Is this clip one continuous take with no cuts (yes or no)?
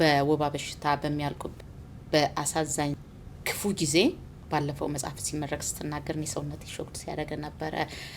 no